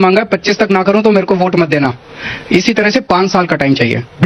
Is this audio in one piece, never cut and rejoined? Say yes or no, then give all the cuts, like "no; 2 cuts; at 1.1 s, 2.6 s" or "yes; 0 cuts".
yes; 0 cuts